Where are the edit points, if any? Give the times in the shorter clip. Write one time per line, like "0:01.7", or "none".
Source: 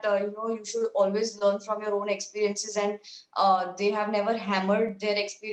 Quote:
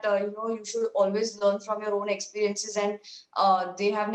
none